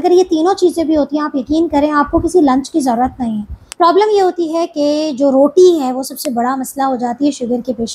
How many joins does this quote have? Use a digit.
1